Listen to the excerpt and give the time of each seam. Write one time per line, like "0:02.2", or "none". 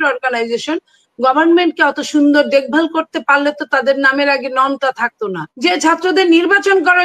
0:05.4